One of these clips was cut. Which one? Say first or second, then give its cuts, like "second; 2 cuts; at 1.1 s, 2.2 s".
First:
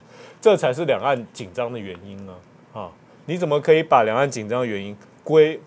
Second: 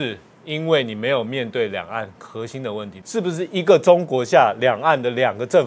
second; 1 cut; at 3.0 s